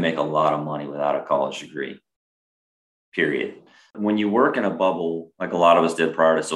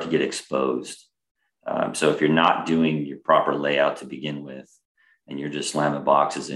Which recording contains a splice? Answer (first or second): first